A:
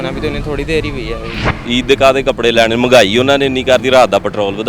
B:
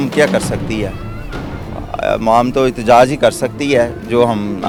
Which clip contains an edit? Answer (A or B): A